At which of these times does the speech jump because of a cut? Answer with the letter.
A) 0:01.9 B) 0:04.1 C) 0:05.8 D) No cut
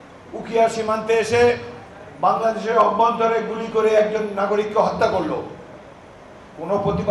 D